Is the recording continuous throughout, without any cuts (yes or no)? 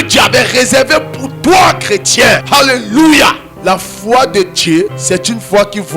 no